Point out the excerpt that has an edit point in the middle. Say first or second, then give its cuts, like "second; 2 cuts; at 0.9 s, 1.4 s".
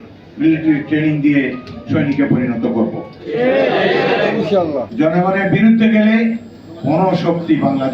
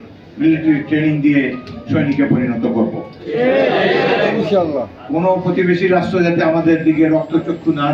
first; 1 cut; at 4.8 s